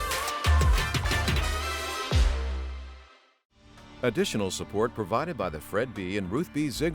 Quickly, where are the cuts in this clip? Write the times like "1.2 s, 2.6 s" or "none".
3.7 s